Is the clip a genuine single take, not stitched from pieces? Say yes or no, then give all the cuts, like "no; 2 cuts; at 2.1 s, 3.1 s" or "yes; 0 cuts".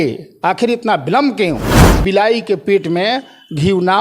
no; 1 cut; at 2.0 s